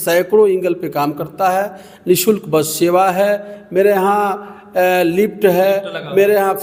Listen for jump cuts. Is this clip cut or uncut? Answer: uncut